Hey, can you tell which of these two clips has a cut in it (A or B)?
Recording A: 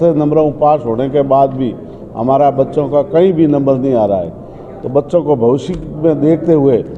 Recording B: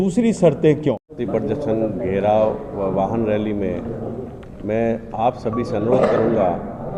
B